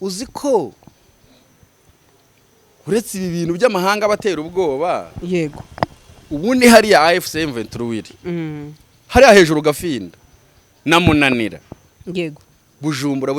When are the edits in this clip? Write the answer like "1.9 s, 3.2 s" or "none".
none